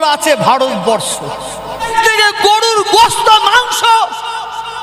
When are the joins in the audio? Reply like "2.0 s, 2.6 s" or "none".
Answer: 1.9 s